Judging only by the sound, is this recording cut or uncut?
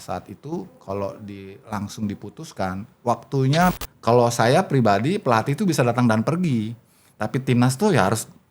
cut